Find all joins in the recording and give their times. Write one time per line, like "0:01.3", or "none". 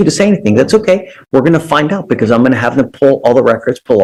none